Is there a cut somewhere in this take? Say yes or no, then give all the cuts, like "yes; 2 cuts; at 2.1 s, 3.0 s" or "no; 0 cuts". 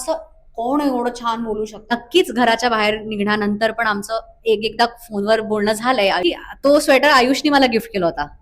yes; 2 cuts; at 1.9 s, 6.2 s